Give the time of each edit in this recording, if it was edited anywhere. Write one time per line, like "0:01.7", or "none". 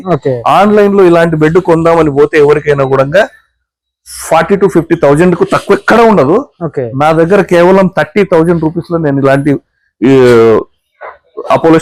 none